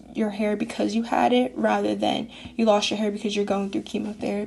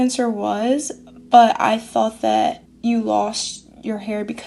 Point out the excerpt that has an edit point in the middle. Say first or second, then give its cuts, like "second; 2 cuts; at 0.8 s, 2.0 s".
second; 1 cut; at 2.7 s